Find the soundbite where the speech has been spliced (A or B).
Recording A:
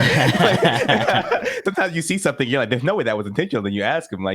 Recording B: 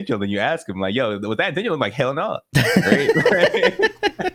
A